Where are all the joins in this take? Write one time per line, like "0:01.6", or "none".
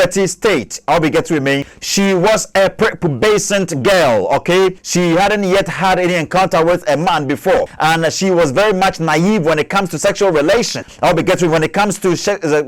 0:01.8
0:04.8
0:07.7
0:10.8